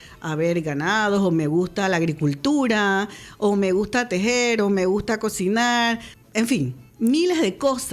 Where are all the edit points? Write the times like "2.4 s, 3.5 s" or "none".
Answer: 6.1 s